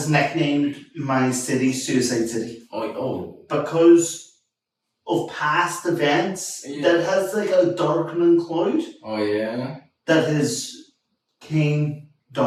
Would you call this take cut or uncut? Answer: uncut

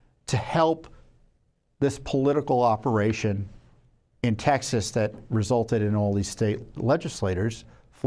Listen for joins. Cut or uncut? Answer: cut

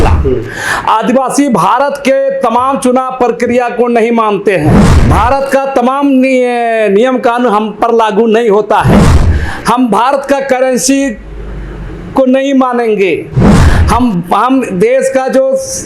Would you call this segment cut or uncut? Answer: cut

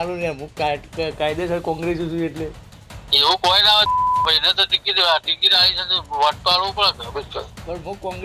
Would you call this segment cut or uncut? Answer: uncut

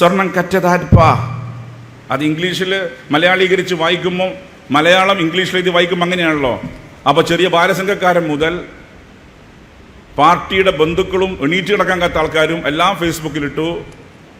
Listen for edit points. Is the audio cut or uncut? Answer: uncut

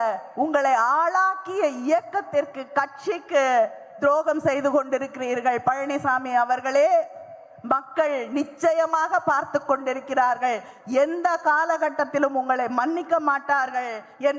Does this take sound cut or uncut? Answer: uncut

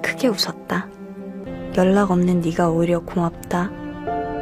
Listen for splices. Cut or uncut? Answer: cut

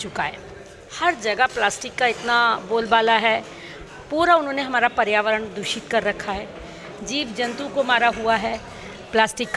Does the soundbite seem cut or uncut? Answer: uncut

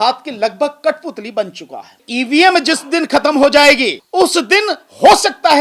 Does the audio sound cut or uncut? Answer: cut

